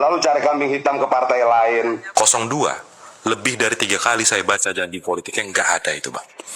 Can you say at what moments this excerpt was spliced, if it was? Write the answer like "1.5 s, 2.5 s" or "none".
2.0 s